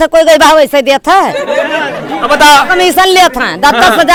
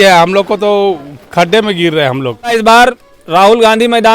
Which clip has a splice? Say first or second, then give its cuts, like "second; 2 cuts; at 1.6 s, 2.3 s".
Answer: second; 1 cut; at 2.5 s